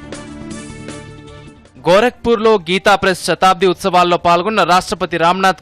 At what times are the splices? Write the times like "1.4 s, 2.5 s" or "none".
none